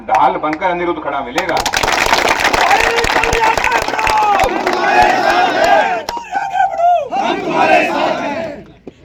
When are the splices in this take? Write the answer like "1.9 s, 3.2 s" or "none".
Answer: none